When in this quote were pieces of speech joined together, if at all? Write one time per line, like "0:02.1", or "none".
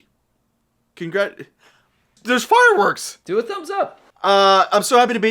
0:02.2